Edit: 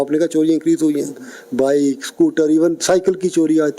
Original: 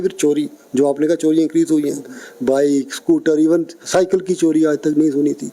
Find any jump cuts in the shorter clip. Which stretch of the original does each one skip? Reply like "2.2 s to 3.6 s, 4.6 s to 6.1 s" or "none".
3.7 s to 3.8 s